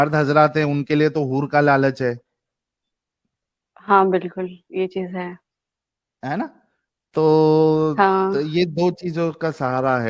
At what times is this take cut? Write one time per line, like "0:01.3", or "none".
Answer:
none